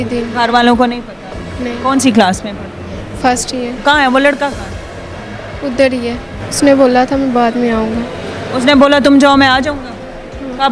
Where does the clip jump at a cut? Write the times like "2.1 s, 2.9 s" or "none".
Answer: 3.8 s, 6.4 s